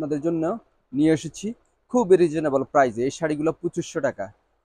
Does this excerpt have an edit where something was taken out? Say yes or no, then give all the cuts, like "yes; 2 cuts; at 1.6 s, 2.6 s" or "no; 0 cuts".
no; 0 cuts